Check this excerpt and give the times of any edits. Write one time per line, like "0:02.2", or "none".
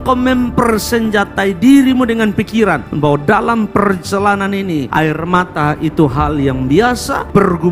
none